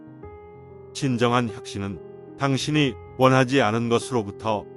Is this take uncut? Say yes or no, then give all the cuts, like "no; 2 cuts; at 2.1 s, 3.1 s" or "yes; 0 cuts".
no; 1 cut; at 1.0 s